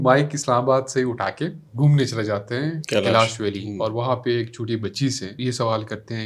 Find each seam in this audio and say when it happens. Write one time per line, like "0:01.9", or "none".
0:01.7
0:02.8
0:05.3